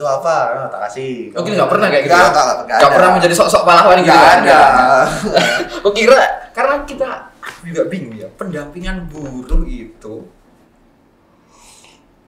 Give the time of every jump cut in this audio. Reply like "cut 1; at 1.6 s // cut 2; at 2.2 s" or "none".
none